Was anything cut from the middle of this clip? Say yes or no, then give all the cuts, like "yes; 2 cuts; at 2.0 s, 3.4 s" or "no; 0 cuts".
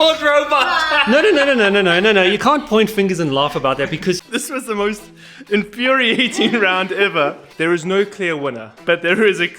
yes; 3 cuts; at 4.2 s, 7.4 s, 8.7 s